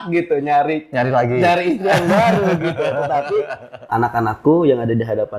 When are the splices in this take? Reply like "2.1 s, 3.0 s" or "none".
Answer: 3.7 s